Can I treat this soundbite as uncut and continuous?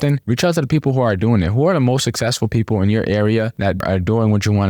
no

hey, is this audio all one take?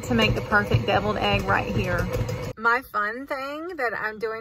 no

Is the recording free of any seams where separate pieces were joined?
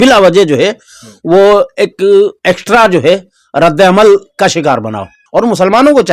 no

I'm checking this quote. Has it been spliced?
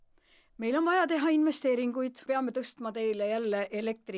yes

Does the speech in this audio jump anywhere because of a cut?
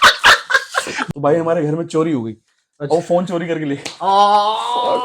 yes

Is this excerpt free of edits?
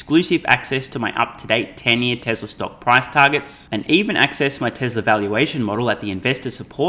yes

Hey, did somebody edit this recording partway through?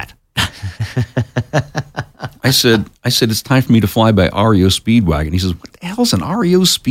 no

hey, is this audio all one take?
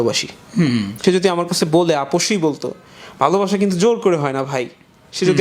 no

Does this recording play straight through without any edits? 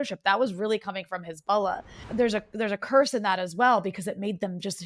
no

